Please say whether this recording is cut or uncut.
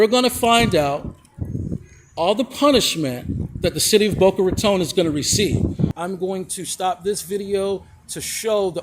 cut